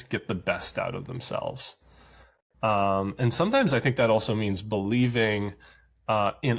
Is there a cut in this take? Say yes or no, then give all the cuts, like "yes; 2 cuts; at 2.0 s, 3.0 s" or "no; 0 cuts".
no; 0 cuts